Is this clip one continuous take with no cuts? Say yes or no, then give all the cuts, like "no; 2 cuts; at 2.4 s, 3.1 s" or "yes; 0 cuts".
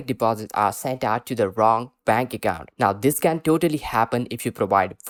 yes; 0 cuts